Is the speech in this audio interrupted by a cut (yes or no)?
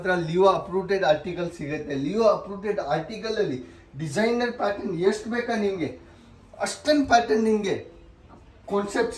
no